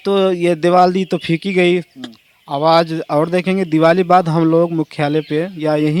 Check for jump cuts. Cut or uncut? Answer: uncut